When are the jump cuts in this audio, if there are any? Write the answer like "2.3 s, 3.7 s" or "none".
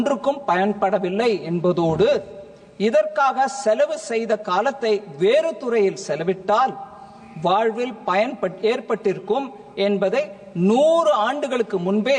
none

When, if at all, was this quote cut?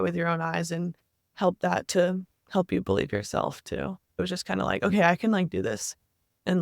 4.2 s

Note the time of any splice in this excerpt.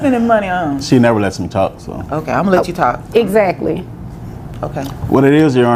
none

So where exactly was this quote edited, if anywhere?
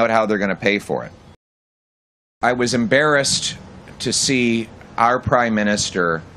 1.9 s

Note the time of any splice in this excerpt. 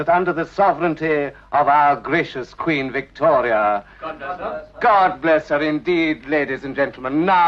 5.9 s

